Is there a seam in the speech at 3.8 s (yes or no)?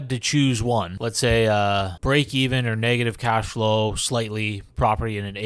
no